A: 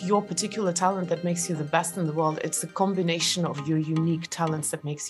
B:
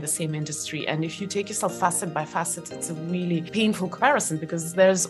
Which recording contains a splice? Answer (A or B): B